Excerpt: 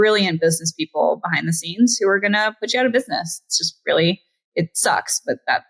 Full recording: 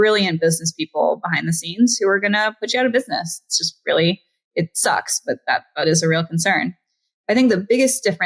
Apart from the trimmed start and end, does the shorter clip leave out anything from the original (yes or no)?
no